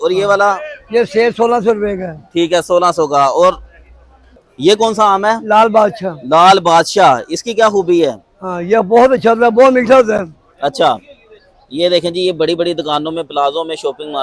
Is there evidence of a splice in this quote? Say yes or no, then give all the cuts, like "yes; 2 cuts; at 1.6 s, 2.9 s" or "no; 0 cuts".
no; 0 cuts